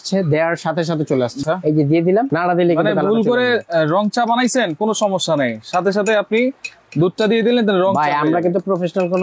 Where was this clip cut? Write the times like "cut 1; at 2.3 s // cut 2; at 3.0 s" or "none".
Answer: cut 1; at 1.4 s